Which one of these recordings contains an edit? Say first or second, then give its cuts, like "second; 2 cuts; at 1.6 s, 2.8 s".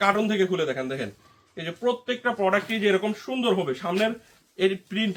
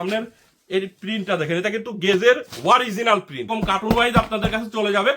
second; 1 cut; at 3.5 s